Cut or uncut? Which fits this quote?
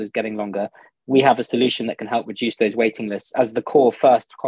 uncut